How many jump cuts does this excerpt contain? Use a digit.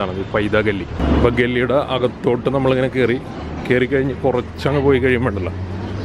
1